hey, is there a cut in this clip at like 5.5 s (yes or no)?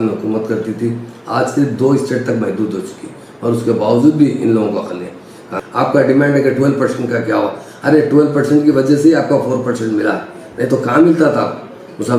yes